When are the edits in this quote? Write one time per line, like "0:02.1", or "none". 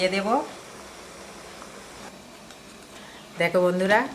0:02.1